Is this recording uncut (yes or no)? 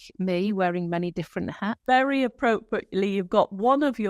no